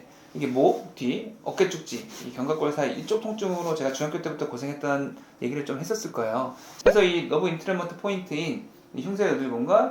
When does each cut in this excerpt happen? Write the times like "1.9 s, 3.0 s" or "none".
6.6 s